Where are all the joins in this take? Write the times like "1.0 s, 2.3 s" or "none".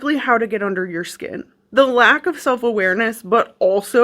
1.5 s